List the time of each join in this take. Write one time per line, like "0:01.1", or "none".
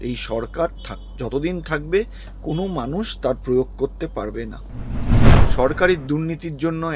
0:05.1